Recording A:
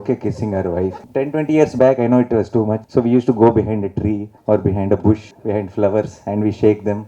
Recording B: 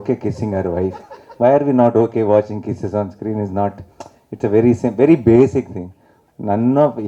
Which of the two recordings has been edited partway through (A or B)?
A